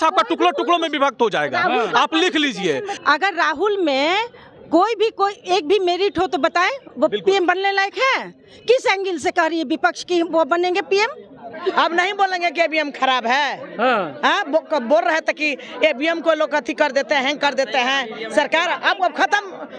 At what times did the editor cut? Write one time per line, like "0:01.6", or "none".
0:02.9
0:11.5